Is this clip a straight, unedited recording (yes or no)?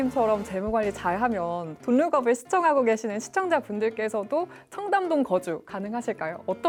yes